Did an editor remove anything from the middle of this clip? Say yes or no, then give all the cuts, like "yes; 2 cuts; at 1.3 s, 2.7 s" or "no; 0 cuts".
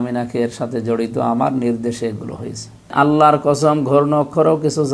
yes; 1 cut; at 2.9 s